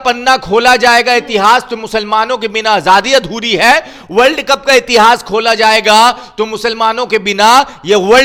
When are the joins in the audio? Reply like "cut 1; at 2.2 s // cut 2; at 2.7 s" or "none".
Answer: none